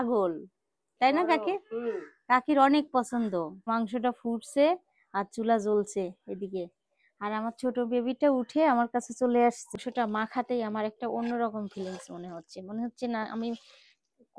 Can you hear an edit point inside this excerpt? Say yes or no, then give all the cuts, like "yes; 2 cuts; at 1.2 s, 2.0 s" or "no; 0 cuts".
yes; 2 cuts; at 3.6 s, 9.6 s